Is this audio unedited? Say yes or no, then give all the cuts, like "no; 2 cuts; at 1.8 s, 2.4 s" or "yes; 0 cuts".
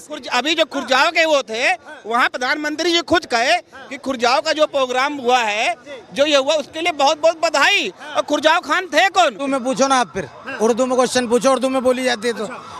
no; 1 cut; at 9.4 s